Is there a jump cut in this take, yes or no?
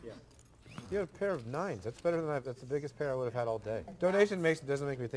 yes